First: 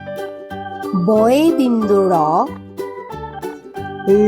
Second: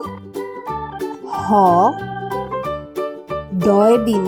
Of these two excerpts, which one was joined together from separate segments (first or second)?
first